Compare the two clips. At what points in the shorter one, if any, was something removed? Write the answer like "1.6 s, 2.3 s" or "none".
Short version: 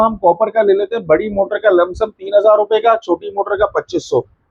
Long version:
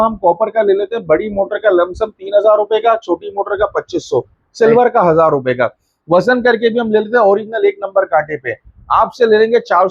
none

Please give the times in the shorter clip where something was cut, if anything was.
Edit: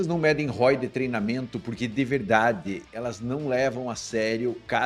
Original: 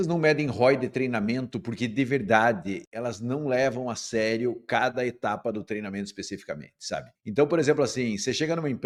none

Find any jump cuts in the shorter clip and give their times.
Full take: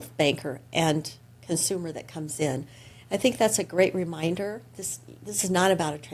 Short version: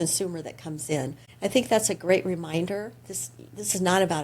1.2 s

